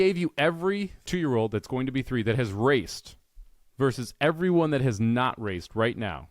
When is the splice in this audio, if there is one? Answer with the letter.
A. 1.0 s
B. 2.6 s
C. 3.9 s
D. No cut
A